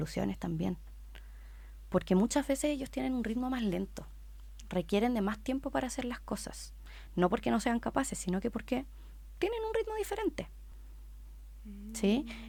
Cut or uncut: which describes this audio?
uncut